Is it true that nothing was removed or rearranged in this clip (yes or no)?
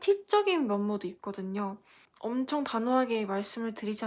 no